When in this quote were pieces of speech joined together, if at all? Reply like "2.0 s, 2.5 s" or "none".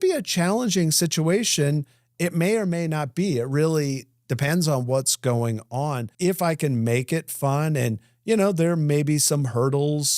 6.1 s